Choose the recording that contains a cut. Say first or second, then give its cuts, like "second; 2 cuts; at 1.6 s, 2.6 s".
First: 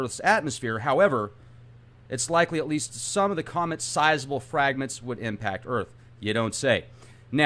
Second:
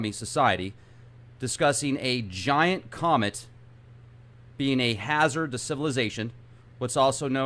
second; 1 cut; at 4.7 s